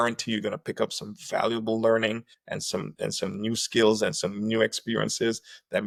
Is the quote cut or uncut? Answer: uncut